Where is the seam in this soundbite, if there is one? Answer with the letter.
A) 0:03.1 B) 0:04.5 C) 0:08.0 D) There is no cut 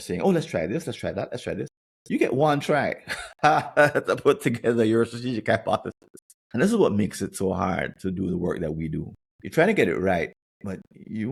D